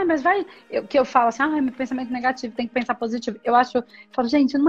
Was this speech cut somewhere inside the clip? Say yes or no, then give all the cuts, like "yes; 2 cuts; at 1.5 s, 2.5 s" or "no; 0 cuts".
no; 0 cuts